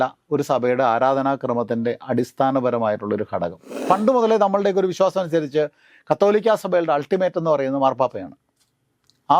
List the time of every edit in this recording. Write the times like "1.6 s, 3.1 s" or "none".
3.7 s